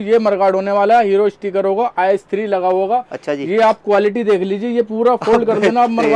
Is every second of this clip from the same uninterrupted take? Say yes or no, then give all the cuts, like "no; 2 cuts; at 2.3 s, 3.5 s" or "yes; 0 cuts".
yes; 0 cuts